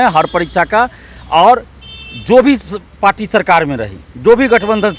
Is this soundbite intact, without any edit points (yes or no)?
yes